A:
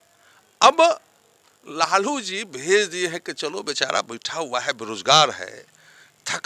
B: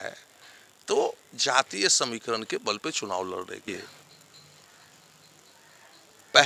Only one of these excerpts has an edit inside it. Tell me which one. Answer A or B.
B